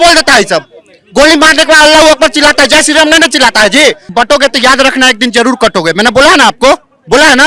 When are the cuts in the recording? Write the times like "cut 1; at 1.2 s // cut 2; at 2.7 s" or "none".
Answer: cut 1; at 4.1 s